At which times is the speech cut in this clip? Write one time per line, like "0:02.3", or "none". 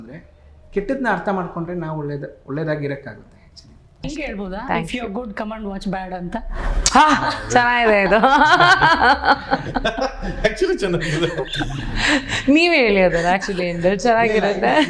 0:04.1